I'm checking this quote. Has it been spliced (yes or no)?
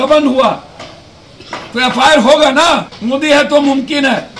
yes